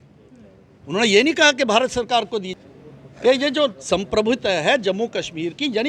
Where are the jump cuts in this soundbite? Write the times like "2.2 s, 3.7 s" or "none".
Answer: 2.5 s